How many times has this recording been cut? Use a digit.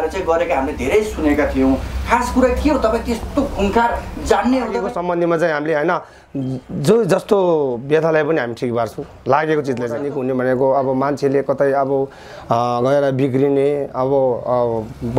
2